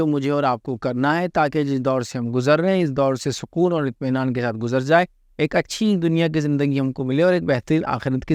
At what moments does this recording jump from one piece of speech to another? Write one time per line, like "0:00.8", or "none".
none